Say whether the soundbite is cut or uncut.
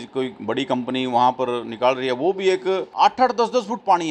cut